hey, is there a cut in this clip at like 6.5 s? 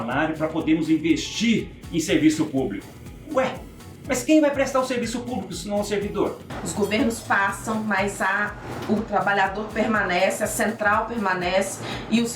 yes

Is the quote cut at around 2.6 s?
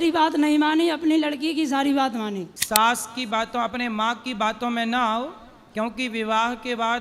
yes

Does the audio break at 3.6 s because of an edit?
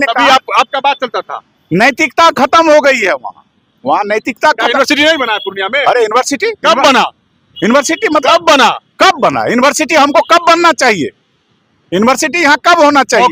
no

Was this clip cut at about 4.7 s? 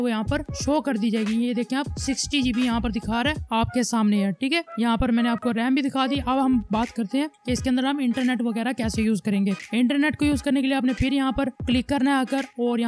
no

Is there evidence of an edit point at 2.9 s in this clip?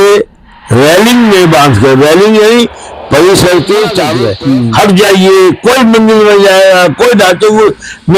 no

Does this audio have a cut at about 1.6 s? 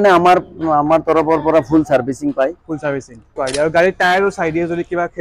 no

